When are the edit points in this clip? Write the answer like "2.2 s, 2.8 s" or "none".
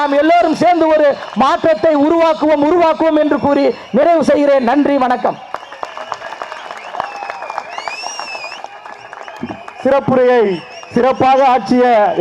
none